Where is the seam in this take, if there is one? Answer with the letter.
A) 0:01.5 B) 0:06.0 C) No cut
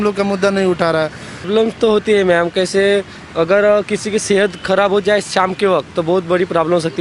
A